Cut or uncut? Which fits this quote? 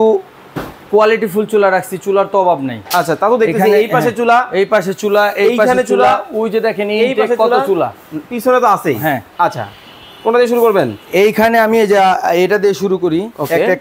uncut